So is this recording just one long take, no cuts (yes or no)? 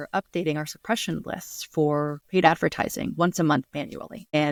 yes